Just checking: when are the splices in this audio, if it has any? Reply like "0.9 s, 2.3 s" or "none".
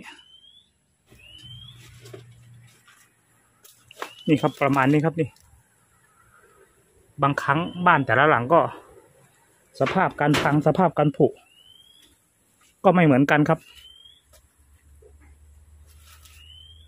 1.1 s